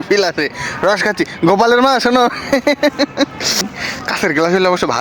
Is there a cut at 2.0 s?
no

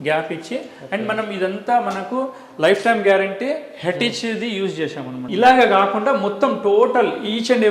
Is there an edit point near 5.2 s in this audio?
yes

